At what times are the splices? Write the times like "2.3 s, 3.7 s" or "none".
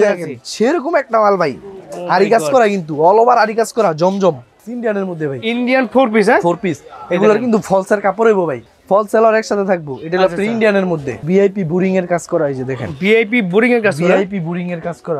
4.6 s, 8.7 s, 11.2 s